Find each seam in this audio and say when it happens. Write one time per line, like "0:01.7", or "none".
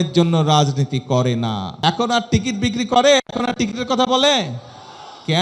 0:01.7